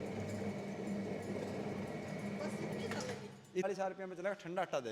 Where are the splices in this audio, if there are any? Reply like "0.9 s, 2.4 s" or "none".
3.6 s